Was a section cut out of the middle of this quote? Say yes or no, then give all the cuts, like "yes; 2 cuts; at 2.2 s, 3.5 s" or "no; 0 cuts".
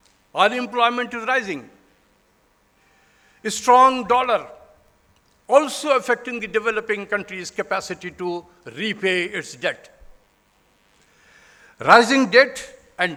no; 0 cuts